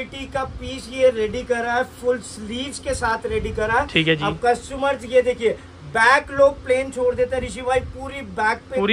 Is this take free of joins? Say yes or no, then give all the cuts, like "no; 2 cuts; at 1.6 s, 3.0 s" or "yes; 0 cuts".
yes; 0 cuts